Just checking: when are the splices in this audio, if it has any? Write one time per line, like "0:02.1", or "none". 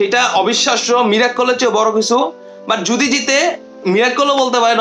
none

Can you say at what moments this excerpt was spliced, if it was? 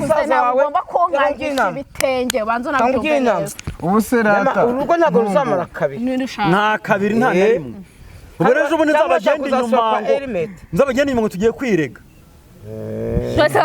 none

